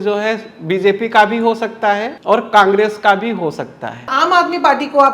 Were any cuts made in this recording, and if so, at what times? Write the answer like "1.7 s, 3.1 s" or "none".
2.1 s, 4.1 s

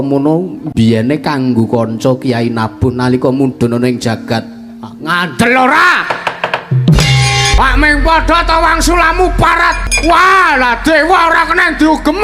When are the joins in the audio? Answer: 7.5 s, 9.9 s

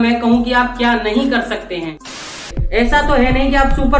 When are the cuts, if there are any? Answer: 2.5 s

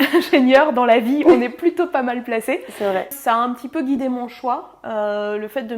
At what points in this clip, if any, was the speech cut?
3.2 s

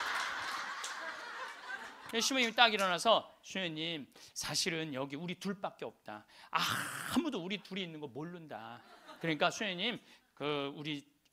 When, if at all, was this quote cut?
1.9 s

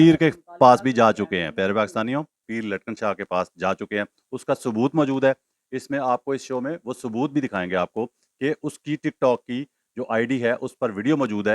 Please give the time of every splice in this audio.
2.4 s

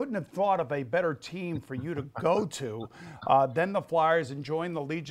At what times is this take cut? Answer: none

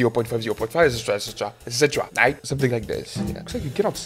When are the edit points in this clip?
none

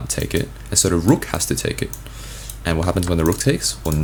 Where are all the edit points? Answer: none

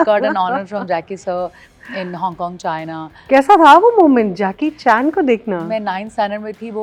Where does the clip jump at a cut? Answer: none

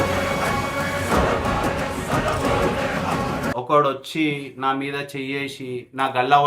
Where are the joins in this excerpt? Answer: 3.5 s

